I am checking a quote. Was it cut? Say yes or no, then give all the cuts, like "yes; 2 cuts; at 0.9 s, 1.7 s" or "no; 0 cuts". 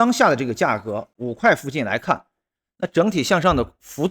yes; 1 cut; at 1.1 s